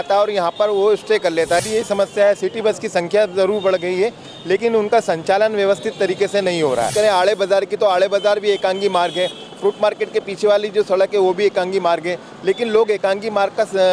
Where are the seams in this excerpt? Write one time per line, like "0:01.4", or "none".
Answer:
0:01.6
0:06.9